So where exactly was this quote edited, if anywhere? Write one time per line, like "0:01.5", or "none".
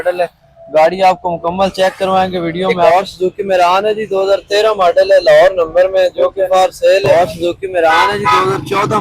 0:02.9
0:07.1